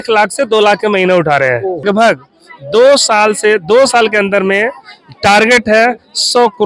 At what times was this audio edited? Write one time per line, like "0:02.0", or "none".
0:01.8